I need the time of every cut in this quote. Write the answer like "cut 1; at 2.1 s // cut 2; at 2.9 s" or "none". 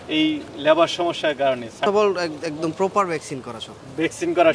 cut 1; at 1.8 s